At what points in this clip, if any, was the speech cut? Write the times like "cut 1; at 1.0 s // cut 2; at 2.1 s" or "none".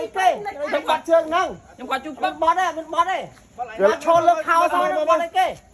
none